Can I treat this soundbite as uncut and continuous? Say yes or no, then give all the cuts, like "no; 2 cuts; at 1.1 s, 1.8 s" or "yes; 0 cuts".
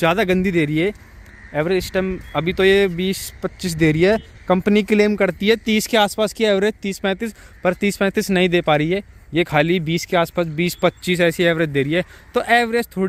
yes; 0 cuts